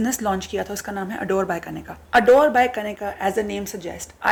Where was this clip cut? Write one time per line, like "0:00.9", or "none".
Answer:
none